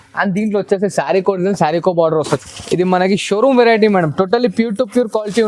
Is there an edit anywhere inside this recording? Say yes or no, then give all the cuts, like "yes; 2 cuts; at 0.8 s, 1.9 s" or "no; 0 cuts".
yes; 1 cut; at 2.4 s